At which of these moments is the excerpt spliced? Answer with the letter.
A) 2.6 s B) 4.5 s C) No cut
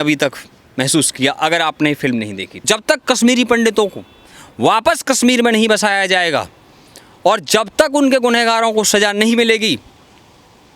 A